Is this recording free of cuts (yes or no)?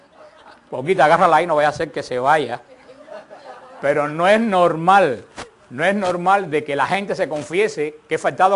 no